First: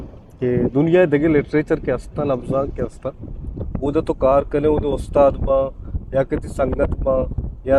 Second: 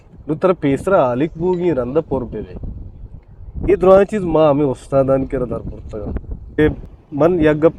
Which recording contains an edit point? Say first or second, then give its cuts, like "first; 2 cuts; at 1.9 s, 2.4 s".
second; 1 cut; at 6.7 s